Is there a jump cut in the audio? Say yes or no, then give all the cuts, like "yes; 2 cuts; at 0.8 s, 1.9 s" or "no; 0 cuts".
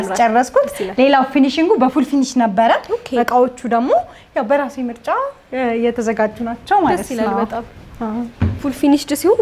no; 0 cuts